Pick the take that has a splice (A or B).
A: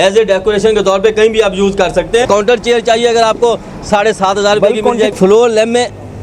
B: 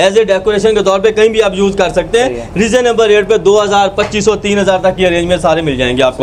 A